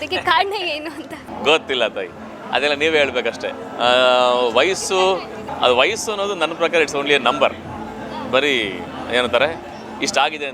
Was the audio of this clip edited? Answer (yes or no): no